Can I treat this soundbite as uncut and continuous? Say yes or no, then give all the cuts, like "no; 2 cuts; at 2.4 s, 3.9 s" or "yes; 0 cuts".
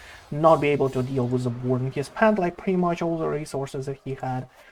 yes; 0 cuts